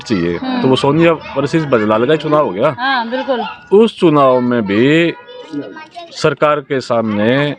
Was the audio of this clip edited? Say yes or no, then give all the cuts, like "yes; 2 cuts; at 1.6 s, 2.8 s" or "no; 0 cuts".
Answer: no; 0 cuts